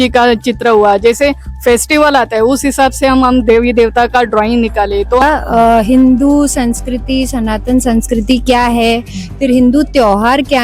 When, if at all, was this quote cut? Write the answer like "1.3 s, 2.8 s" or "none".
5.2 s